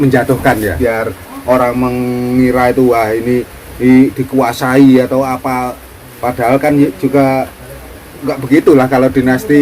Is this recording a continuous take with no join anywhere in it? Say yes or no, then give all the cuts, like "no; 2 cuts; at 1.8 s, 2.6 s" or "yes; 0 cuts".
no; 1 cut; at 1.3 s